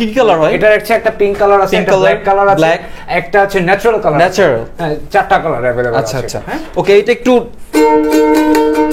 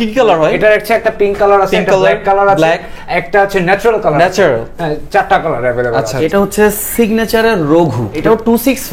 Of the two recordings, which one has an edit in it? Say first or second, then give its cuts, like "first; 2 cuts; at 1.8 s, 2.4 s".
second; 2 cuts; at 6.2 s, 8.2 s